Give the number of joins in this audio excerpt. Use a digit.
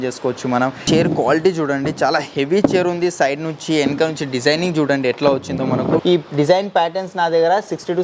2